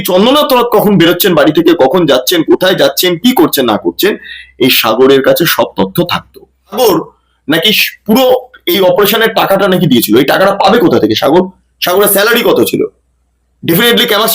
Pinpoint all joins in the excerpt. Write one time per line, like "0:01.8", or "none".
0:06.7